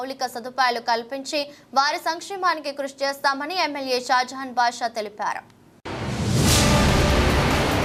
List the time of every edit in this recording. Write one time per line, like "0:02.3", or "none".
none